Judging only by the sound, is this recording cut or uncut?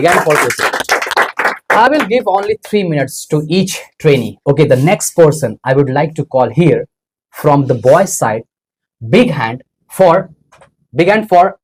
uncut